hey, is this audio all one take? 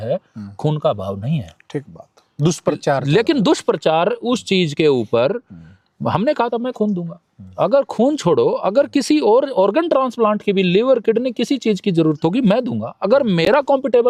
yes; 0 cuts

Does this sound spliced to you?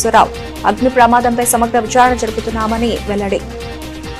no; 0 cuts

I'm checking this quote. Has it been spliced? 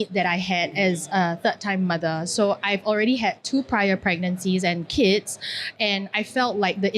no; 0 cuts

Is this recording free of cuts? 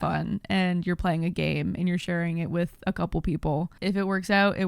no; 1 cut; at 3.7 s

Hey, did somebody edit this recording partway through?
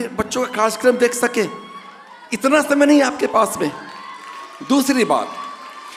no; 0 cuts

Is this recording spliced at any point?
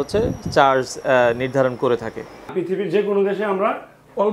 yes; 1 cut; at 2.5 s

